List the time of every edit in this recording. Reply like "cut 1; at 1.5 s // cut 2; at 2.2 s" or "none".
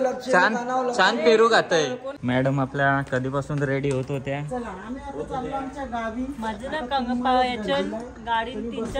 cut 1; at 2.1 s

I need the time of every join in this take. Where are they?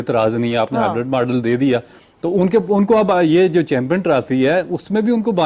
none

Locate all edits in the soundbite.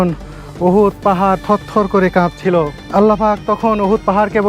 cut 1; at 2.8 s

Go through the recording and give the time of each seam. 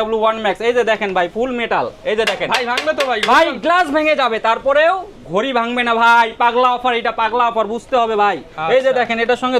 none

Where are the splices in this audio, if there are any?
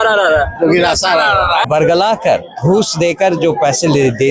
cut 1; at 1.6 s

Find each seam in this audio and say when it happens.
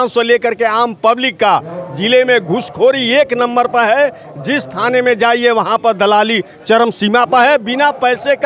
none

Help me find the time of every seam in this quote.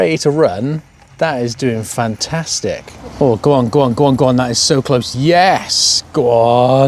cut 1; at 3.0 s

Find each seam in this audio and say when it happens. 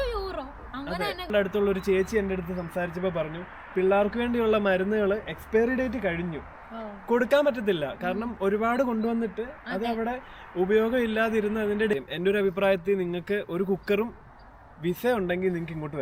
cut 1; at 1.3 s // cut 2; at 11.9 s

